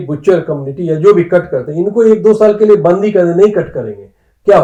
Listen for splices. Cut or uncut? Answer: uncut